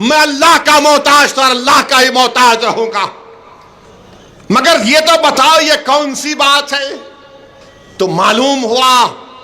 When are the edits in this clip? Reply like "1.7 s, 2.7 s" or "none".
none